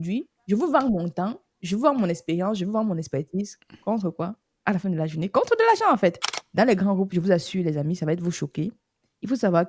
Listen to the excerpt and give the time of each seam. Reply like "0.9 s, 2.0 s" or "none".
6.3 s